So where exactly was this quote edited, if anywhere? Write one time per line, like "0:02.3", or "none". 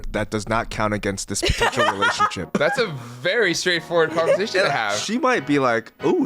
0:02.6